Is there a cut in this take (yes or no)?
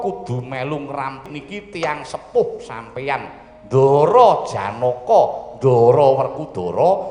yes